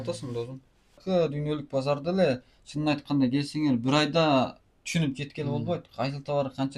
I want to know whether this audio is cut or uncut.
cut